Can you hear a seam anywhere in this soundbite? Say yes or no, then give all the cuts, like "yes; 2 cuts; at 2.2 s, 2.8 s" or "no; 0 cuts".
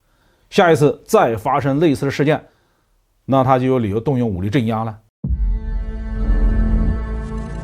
yes; 1 cut; at 5.1 s